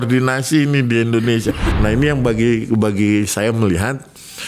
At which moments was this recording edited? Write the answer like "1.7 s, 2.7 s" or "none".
1.7 s